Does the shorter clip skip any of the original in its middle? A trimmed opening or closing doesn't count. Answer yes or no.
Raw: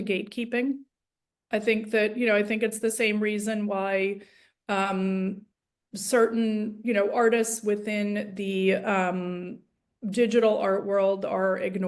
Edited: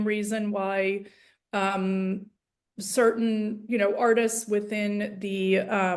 no